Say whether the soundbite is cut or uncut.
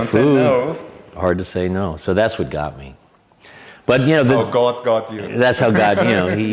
uncut